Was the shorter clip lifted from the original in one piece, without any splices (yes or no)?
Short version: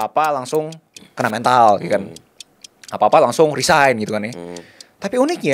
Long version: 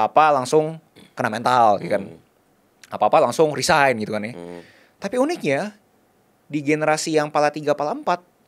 yes